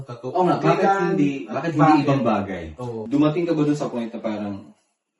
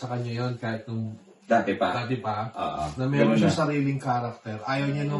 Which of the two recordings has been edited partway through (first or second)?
first